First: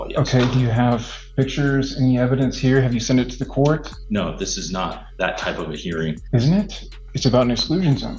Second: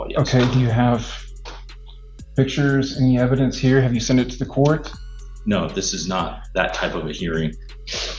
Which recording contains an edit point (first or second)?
first